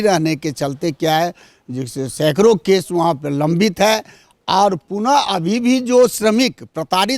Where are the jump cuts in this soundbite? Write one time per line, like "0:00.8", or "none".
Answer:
none